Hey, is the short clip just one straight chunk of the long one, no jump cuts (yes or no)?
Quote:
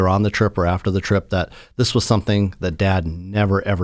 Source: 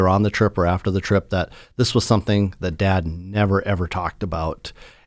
yes